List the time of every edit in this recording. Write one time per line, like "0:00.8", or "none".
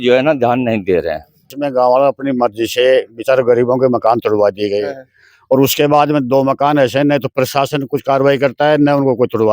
0:01.4